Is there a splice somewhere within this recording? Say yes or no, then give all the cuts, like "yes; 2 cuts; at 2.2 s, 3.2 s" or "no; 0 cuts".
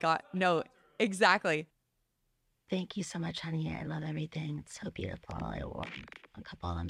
yes; 1 cut; at 1.8 s